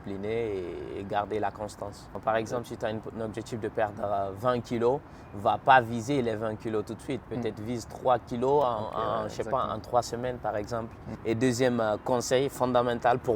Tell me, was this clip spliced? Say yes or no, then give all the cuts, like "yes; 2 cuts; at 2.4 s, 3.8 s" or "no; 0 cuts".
yes; 2 cuts; at 2.1 s, 11.1 s